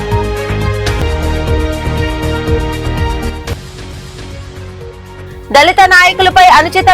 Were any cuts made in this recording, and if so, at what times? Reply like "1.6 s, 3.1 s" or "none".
1.0 s